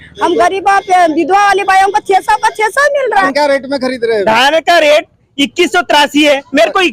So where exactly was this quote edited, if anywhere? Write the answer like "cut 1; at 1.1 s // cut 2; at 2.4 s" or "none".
cut 1; at 3.3 s